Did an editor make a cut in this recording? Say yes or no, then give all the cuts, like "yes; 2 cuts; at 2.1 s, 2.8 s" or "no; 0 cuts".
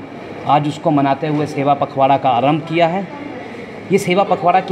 no; 0 cuts